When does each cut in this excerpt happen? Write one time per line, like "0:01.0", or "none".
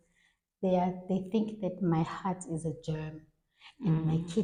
none